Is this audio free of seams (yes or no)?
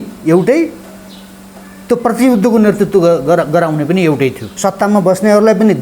no